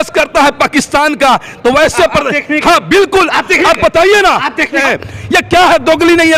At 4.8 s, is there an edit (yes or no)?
yes